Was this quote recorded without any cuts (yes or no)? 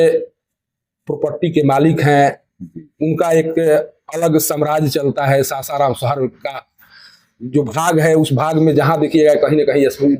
yes